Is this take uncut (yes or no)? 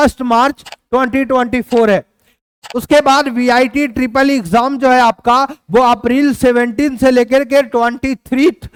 yes